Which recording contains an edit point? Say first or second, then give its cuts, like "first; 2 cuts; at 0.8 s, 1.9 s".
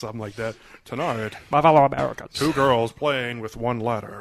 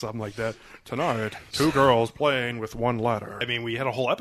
second; 2 cuts; at 1.4 s, 3.4 s